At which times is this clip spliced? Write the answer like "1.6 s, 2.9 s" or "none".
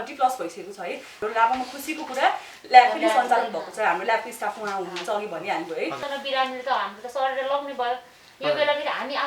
1.2 s, 6.0 s